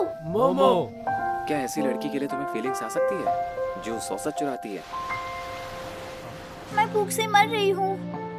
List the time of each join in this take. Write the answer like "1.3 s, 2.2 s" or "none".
1.0 s, 6.6 s